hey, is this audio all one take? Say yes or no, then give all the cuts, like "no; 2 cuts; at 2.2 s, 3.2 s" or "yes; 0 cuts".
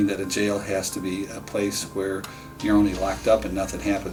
yes; 0 cuts